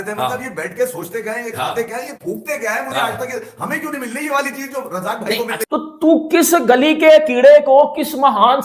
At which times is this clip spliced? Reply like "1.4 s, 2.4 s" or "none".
5.6 s